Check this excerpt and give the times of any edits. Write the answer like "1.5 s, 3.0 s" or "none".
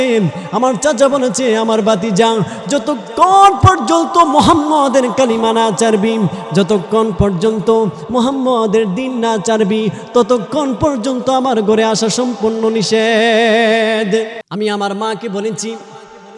14.4 s